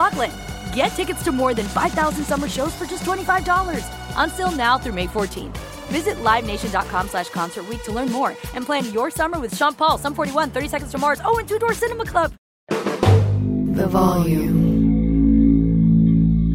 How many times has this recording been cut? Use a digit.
1